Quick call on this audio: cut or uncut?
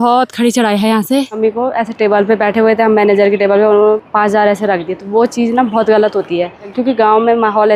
cut